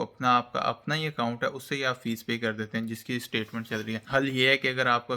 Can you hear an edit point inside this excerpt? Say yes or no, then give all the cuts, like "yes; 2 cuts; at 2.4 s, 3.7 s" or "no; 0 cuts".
yes; 1 cut; at 4.0 s